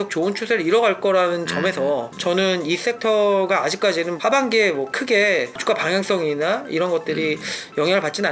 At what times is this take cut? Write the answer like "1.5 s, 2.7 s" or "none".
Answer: none